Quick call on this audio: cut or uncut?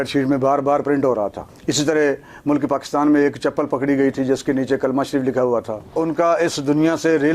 cut